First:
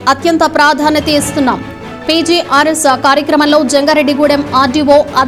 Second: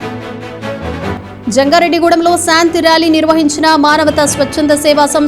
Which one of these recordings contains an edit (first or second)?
second